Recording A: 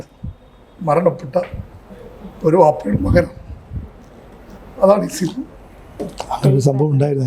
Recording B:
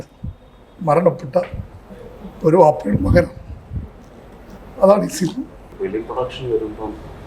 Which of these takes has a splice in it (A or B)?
B